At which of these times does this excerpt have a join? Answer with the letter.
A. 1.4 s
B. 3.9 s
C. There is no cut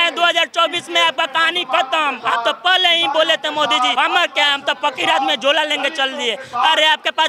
B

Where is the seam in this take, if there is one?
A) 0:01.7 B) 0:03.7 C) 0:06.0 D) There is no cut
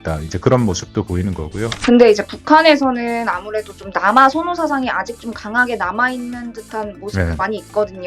A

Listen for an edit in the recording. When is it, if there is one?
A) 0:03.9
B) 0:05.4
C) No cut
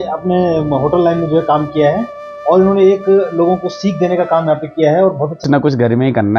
B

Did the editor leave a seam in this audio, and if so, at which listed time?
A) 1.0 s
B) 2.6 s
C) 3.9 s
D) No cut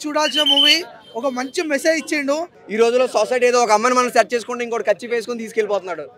B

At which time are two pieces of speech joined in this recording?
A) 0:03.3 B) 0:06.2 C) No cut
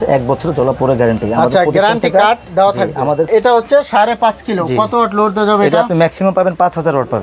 A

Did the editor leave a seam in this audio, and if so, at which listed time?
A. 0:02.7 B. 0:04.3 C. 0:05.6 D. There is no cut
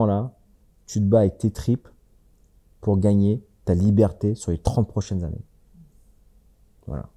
D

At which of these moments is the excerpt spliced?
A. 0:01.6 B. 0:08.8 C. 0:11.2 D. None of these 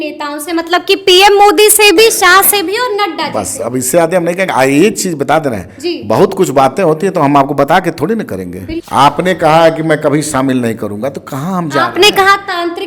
B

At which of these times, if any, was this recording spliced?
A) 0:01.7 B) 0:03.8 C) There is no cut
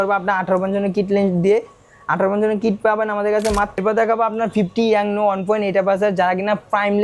B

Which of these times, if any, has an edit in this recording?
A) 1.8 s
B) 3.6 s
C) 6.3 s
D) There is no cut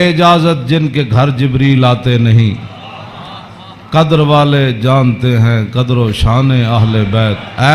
D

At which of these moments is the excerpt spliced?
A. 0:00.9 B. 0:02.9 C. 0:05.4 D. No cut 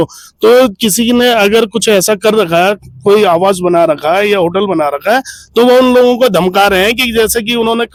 D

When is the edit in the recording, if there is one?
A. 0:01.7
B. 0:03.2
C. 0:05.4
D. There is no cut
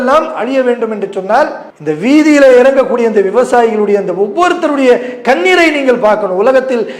A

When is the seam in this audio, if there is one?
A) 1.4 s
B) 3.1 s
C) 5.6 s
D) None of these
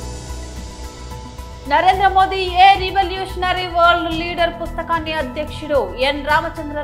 A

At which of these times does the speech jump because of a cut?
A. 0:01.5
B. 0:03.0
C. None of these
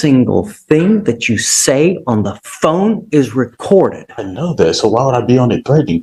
C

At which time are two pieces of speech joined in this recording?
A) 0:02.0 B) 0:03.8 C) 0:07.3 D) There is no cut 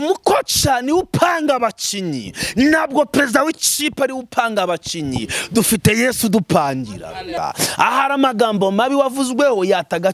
C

